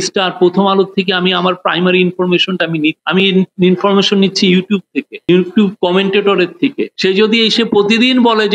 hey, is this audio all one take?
yes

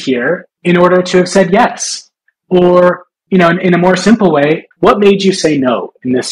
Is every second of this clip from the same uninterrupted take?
no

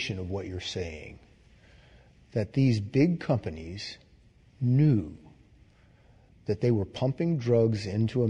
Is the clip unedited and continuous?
yes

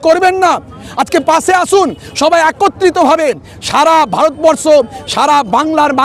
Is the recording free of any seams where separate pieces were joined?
yes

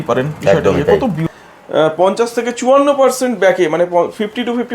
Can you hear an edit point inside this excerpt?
yes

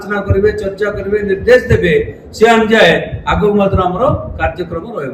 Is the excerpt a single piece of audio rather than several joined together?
yes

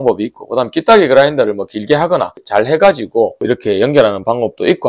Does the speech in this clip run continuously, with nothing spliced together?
no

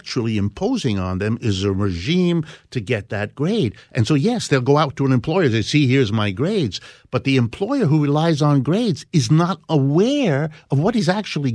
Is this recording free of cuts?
yes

